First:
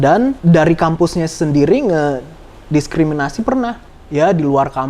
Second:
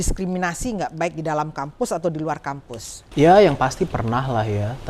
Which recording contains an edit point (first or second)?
first